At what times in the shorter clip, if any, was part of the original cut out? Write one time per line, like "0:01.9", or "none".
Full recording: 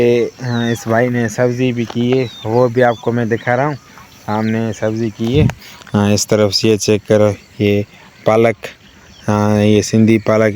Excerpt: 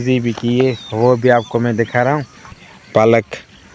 0:02.6